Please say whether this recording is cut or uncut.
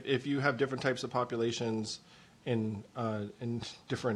uncut